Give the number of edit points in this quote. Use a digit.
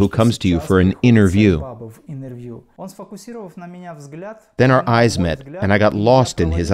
1